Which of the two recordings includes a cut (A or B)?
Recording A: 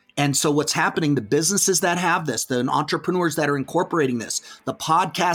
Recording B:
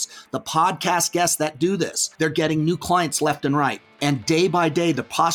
B